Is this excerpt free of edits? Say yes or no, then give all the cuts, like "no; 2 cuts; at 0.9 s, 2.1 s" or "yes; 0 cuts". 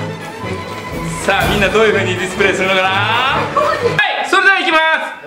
no; 1 cut; at 3.9 s